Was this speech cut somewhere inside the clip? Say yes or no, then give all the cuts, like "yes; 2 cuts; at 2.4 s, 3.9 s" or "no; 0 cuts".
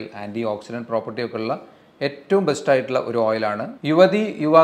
yes; 1 cut; at 3.7 s